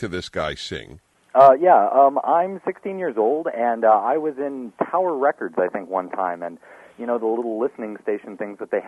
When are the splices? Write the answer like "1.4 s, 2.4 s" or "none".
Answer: 1.2 s